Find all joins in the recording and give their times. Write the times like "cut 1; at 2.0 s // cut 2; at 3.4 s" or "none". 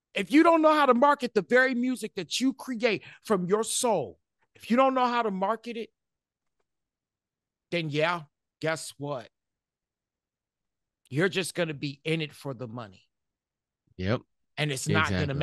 none